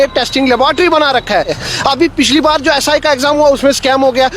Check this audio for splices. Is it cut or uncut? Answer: cut